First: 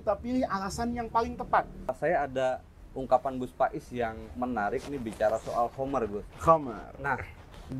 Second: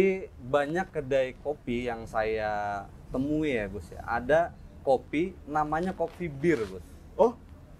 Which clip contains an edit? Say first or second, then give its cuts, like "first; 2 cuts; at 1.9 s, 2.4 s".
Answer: first; 1 cut; at 1.9 s